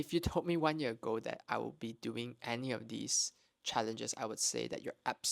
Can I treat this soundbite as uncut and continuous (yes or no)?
yes